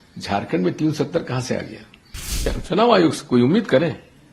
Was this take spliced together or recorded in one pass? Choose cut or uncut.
cut